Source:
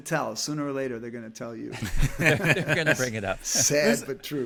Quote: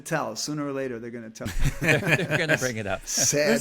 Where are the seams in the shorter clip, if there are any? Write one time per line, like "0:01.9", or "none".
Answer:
0:01.4